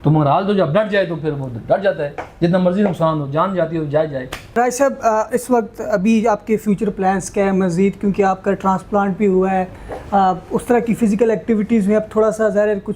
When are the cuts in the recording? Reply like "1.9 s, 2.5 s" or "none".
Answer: 4.6 s

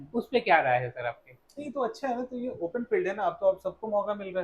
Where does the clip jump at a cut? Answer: none

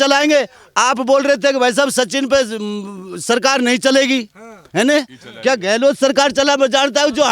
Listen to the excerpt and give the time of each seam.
none

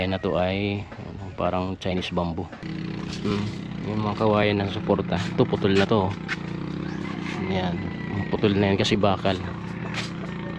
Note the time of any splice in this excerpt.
2.6 s

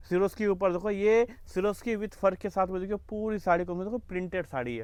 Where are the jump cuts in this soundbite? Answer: none

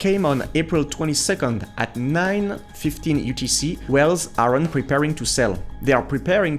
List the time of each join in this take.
3.8 s

